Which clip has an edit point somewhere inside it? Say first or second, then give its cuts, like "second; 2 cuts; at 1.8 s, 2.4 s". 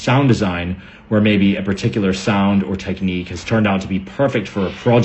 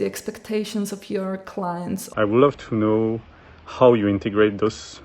second; 1 cut; at 2.1 s